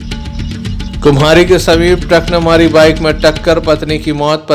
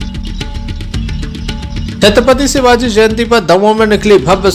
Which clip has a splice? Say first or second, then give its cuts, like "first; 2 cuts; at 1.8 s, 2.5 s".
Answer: second; 1 cut; at 1.3 s